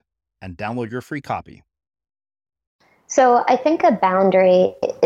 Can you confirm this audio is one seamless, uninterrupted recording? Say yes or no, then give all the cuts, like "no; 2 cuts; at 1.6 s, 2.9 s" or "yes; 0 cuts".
no; 1 cut; at 3.1 s